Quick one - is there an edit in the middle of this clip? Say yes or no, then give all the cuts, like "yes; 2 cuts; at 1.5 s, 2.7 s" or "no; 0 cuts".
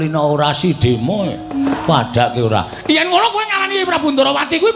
yes; 1 cut; at 1.7 s